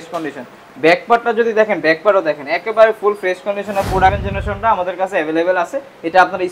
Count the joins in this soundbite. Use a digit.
1